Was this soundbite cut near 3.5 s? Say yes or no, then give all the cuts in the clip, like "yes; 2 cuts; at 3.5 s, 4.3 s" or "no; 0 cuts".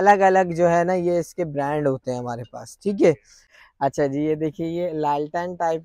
yes; 1 cut; at 3.5 s